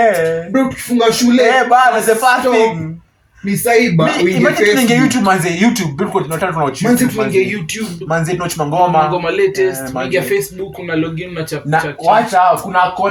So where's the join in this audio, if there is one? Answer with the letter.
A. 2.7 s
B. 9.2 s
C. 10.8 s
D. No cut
D